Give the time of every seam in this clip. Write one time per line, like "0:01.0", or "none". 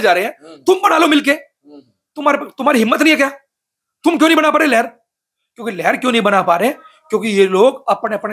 none